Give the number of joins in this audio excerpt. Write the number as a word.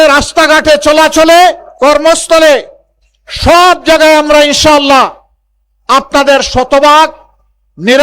zero